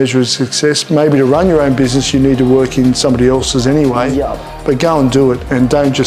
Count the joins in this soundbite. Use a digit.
0